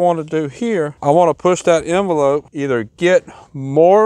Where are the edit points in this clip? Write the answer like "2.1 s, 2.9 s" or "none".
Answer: 0.9 s, 2.5 s

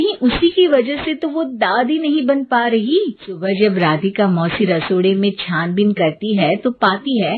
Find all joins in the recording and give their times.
3.3 s

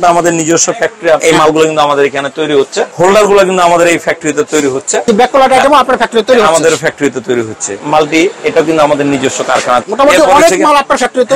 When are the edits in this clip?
1.2 s, 2.9 s, 5.1 s, 7.7 s, 9.9 s

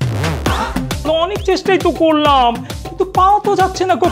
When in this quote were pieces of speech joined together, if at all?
1.1 s

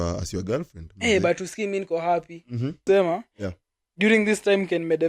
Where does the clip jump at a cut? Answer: 2.8 s

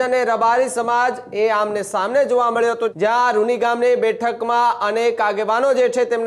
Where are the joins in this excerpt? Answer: 2.9 s

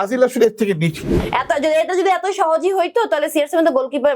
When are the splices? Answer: 1.1 s

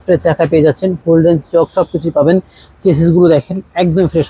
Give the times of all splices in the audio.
none

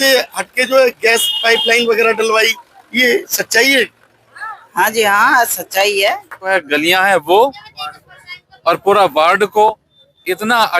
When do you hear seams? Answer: 6.5 s

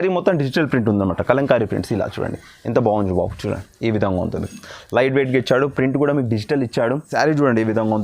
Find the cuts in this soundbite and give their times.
7.1 s

